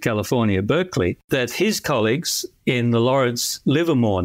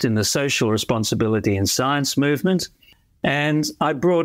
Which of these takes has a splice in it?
first; 1 cut; at 1.2 s

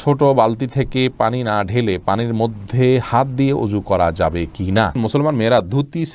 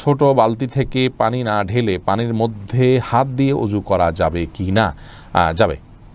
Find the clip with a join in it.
first; 1 cut; at 5.0 s

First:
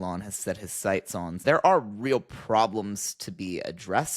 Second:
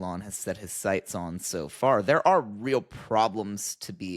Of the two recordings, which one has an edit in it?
first; 1 cut; at 1.4 s

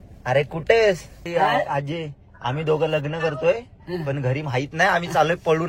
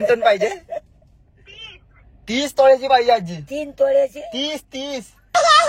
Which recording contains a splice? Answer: first; 1 cut; at 1.1 s

